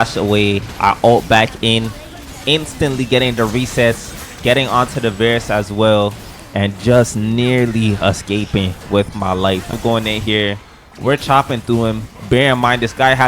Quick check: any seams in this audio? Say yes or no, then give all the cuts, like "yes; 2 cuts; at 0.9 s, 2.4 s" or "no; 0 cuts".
yes; 1 cut; at 9.8 s